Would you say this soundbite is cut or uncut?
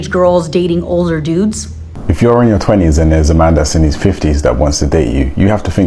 cut